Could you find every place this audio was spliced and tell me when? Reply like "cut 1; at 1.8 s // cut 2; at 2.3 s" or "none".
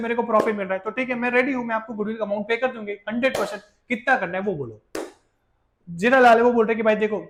none

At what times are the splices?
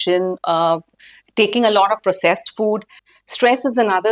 cut 1; at 3.0 s

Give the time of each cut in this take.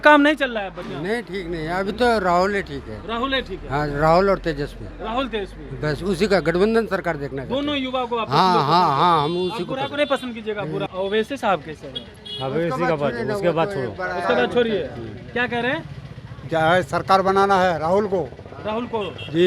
cut 1; at 10.9 s

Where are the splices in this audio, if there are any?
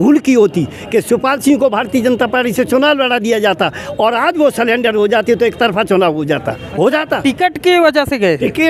none

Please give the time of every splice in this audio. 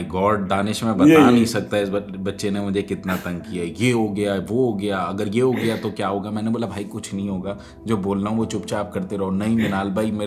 none

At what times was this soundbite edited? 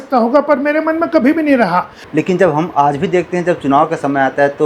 cut 1; at 2.0 s

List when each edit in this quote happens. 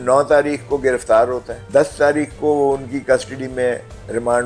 cut 1; at 1.5 s

